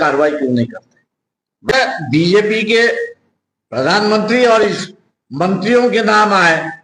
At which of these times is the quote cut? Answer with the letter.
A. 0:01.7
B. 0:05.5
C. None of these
A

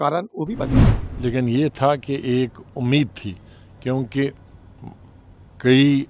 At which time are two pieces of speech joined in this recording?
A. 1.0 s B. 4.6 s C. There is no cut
A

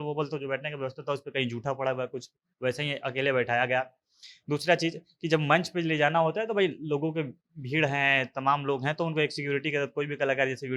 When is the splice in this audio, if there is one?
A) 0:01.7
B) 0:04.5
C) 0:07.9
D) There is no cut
D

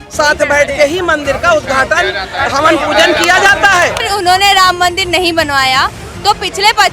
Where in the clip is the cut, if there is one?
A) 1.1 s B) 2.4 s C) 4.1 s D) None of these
C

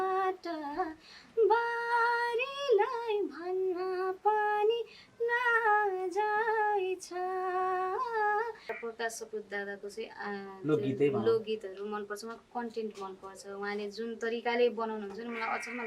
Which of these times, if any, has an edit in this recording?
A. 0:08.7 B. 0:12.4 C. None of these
A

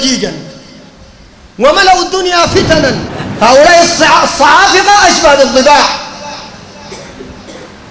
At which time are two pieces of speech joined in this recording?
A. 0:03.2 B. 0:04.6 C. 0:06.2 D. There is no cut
A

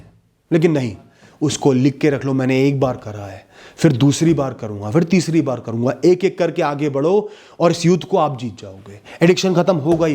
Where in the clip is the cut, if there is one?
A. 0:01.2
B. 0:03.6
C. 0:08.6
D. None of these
A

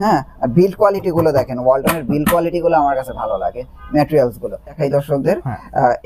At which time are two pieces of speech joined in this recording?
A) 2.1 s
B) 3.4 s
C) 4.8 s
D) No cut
C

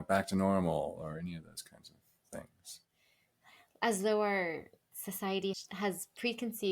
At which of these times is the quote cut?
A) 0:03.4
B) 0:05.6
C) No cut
B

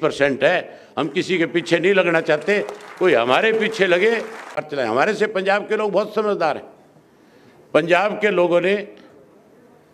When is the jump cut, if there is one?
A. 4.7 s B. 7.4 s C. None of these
A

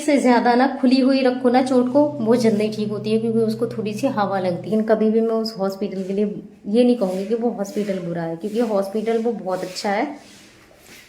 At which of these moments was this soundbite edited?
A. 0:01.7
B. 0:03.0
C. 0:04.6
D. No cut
C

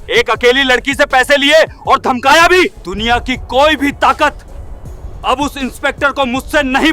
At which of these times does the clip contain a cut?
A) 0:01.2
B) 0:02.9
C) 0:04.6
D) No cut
B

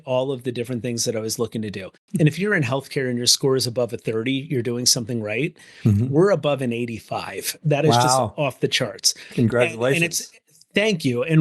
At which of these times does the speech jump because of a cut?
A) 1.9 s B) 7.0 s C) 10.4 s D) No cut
A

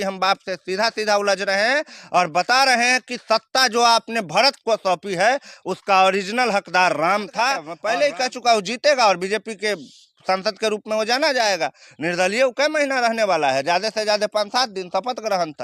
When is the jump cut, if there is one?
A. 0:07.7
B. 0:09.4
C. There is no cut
A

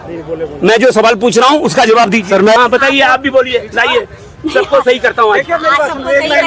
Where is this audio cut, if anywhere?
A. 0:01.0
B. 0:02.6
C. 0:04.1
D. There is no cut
B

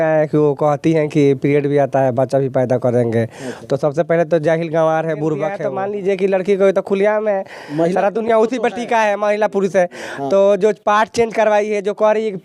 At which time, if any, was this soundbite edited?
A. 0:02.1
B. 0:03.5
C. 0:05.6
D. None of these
C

